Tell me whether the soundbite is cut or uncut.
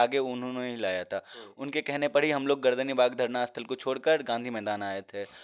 uncut